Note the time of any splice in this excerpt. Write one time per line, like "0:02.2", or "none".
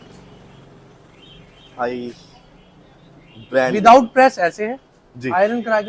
none